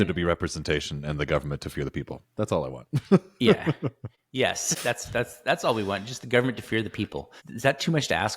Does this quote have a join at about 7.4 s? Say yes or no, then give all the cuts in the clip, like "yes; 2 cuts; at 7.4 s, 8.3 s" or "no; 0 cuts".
yes; 2 cuts; at 4.7 s, 7.4 s